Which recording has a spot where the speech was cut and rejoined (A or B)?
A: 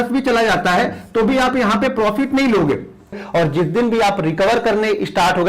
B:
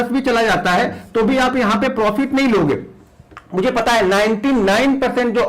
A